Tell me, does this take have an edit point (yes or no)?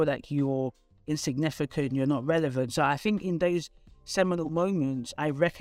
no